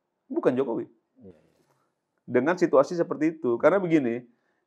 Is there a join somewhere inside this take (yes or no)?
no